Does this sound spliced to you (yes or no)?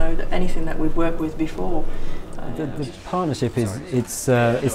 yes